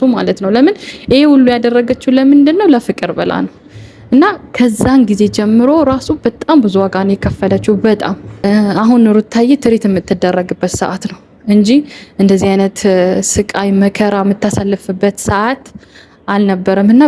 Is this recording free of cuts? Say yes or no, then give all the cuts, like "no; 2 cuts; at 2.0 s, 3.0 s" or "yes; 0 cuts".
no; 1 cut; at 8.3 s